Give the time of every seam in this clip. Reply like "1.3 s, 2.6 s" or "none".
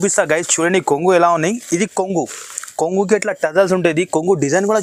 none